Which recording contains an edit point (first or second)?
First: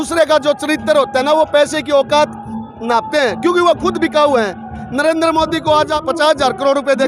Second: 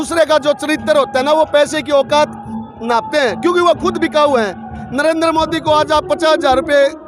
first